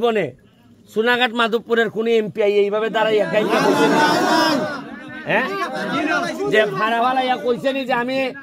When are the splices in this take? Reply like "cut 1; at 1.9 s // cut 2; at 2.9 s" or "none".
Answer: none